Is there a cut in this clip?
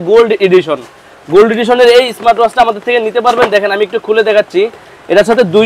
no; 0 cuts

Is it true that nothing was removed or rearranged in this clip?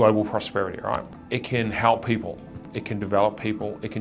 no; 2 cuts; at 1.1 s, 2.7 s

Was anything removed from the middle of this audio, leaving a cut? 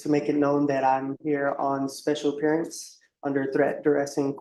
no; 0 cuts

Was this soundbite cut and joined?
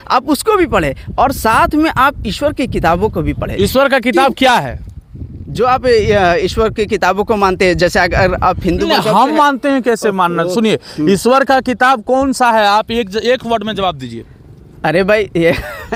no; 0 cuts

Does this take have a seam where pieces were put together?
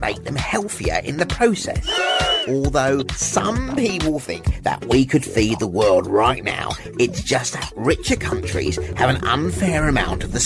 no; 0 cuts

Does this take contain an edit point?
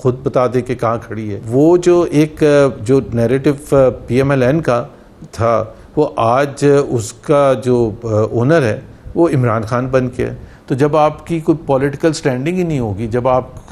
yes; 2 cuts; at 1.4 s, 10.5 s

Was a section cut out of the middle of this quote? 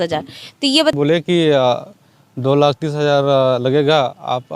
yes; 1 cut; at 0.9 s

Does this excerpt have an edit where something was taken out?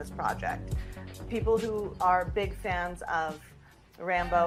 no; 0 cuts

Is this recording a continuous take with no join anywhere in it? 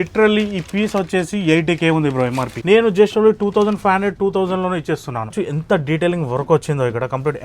no; 2 cuts; at 2.5 s, 5.4 s

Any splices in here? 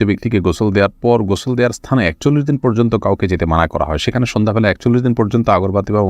no; 0 cuts

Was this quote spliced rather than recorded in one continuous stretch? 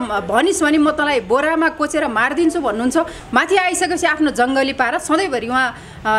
yes; 1 cut; at 3.2 s

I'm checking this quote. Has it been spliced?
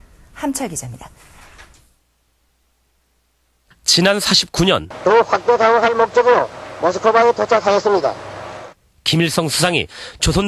no; 0 cuts

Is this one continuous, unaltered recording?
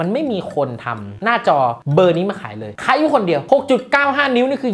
yes; 0 cuts

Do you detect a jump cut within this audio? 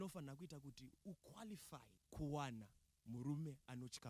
yes; 1 cut; at 2.0 s

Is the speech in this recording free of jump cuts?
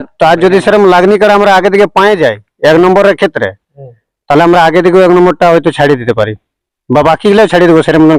yes; 0 cuts

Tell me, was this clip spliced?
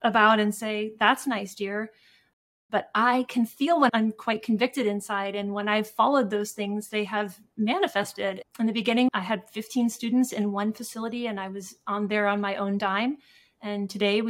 yes; 1 cut; at 8.4 s

